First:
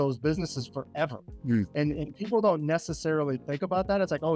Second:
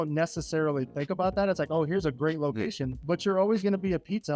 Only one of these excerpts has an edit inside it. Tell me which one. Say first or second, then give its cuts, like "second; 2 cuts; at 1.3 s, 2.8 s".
second; 1 cut; at 2.9 s